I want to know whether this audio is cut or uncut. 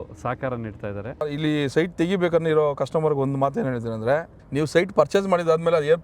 cut